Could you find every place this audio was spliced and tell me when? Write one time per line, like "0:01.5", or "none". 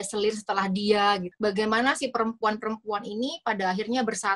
0:01.3